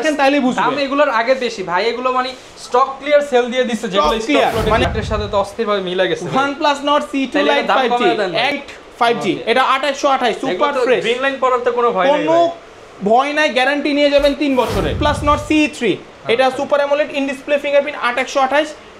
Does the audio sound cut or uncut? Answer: cut